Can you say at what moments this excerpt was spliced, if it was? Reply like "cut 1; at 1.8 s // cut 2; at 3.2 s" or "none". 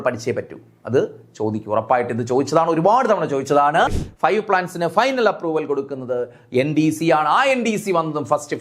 cut 1; at 4.0 s